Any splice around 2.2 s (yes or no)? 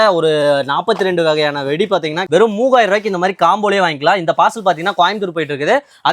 yes